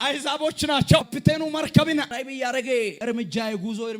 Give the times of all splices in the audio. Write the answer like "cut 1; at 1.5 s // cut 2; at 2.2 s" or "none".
cut 1; at 1.1 s // cut 2; at 2.1 s // cut 3; at 3.0 s